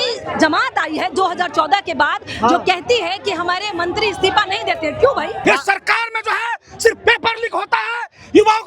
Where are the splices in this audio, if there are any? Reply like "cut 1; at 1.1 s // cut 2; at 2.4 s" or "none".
cut 1; at 5.4 s